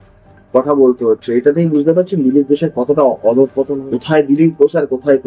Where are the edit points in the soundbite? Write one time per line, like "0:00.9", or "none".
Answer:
0:03.7